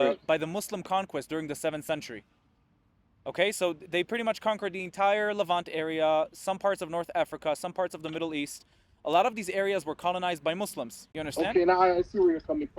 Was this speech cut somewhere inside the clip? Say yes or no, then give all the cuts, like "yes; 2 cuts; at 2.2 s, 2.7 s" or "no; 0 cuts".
yes; 1 cut; at 11.1 s